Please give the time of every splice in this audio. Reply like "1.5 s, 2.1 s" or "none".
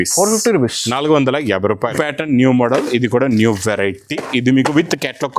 1.9 s